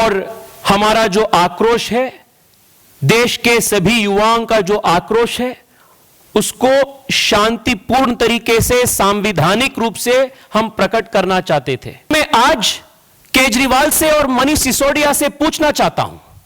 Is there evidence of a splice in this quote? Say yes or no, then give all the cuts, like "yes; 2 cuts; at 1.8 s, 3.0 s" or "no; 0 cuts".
yes; 1 cut; at 12.1 s